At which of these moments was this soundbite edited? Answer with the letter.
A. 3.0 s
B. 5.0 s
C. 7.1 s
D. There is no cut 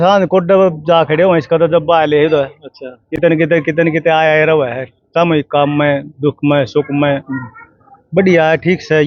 D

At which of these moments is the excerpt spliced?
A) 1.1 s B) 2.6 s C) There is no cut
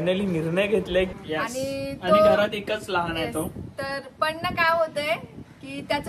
A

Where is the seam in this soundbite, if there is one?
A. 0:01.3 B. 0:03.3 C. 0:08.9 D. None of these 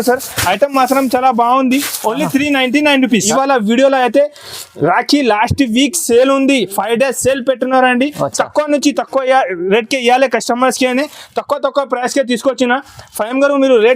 B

